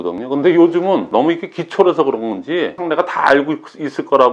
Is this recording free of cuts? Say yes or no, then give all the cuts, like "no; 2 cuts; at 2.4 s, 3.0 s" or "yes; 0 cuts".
no; 2 cuts; at 1.1 s, 2.8 s